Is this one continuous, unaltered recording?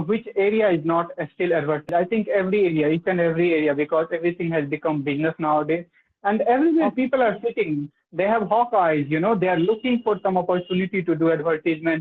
no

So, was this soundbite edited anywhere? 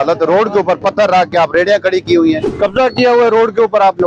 yes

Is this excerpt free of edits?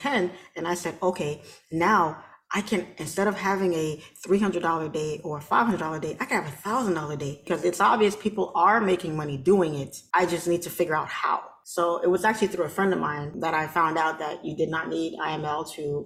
no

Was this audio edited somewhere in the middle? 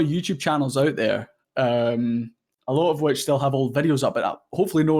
no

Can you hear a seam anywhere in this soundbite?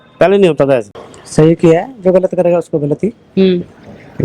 yes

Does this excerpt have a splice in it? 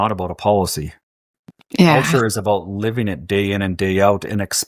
no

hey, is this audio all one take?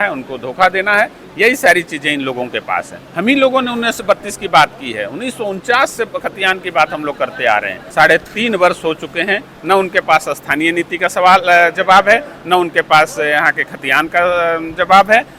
no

